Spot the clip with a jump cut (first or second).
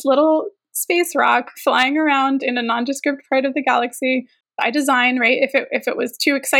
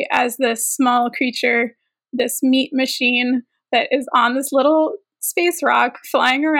first